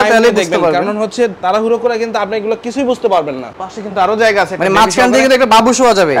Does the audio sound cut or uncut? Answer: cut